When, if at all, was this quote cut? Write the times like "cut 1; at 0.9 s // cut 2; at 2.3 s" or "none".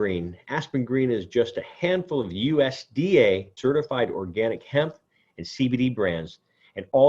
cut 1; at 3.5 s